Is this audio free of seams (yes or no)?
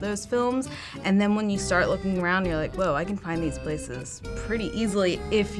yes